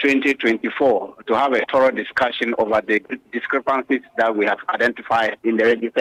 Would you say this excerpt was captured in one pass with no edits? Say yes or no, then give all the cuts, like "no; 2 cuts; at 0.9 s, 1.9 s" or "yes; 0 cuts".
yes; 0 cuts